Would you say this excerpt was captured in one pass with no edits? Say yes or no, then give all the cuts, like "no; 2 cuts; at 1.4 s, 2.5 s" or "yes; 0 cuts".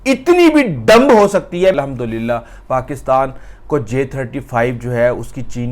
no; 1 cut; at 1.7 s